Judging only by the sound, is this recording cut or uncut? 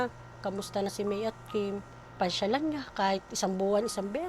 cut